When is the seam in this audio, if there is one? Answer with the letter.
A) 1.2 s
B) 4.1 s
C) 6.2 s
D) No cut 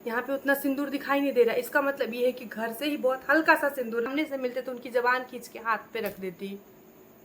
B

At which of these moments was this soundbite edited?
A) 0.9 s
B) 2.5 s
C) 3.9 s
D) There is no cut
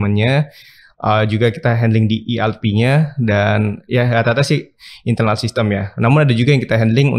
D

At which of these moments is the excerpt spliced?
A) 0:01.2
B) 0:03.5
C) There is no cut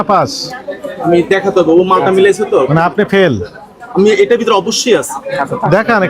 C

